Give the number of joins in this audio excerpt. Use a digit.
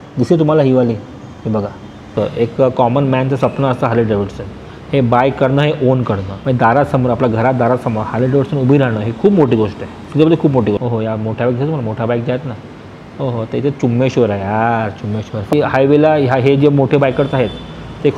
4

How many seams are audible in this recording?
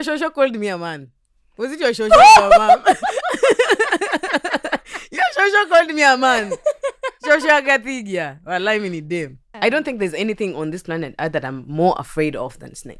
1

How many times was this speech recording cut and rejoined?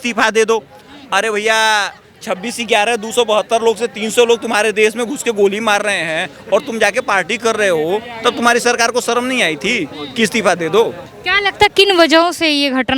1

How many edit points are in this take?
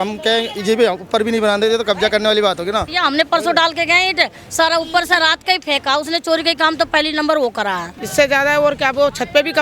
2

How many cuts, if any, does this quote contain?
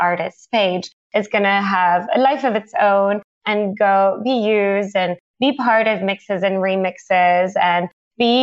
0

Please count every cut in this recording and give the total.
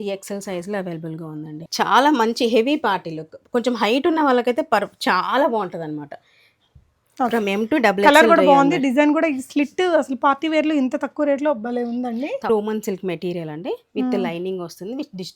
2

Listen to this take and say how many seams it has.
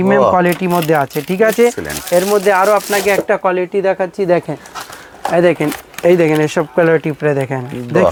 0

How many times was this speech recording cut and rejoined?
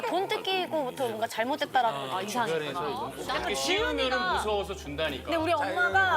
1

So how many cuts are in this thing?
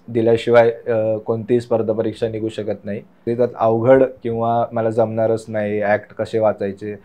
1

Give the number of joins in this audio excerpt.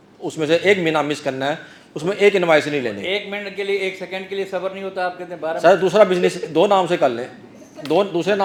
0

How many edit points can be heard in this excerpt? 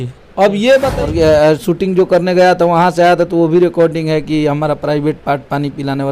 1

